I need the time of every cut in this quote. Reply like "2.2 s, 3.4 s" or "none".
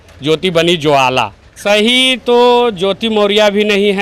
1.4 s